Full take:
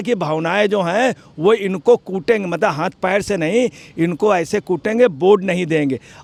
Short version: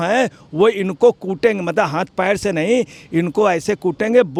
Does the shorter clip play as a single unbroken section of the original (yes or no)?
yes